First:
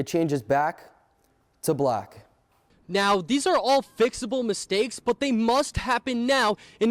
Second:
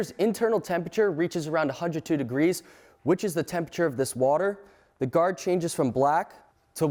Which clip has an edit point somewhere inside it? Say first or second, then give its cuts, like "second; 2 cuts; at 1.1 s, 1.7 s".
first; 1 cut; at 2.7 s